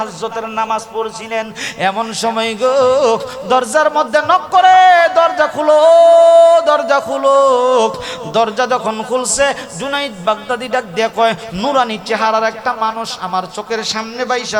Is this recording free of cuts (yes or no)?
yes